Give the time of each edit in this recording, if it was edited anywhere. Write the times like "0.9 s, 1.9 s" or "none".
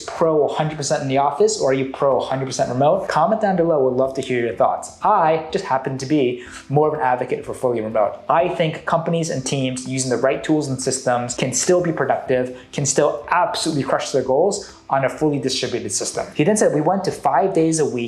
none